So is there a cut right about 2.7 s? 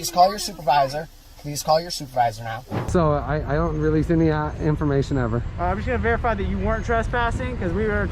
yes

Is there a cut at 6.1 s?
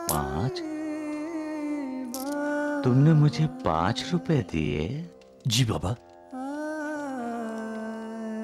no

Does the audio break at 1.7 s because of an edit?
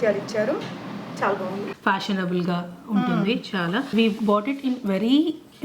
yes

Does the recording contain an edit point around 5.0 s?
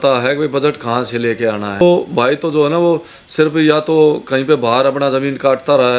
no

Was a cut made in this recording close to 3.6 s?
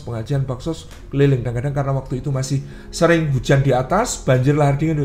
no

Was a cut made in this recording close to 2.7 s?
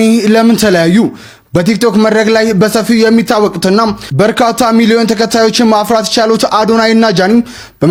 no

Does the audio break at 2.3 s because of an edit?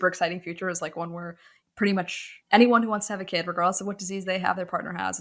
yes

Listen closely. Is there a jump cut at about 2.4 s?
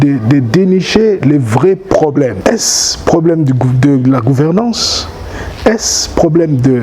yes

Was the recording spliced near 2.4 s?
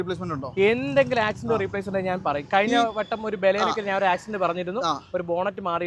no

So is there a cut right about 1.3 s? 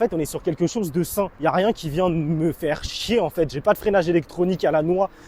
yes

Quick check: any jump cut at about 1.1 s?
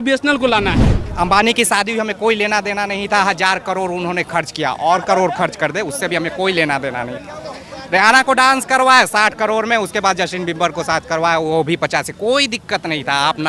yes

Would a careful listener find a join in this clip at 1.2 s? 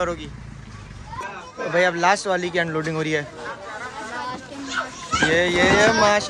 yes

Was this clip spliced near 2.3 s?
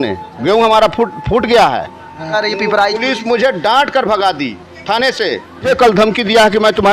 yes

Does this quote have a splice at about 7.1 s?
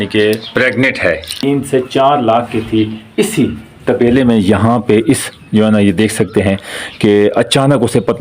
no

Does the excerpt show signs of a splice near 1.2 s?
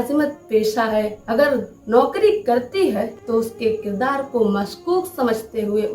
yes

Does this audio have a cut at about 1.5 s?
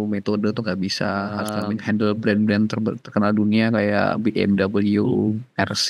yes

